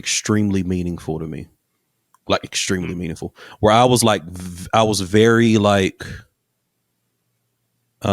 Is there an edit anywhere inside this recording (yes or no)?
no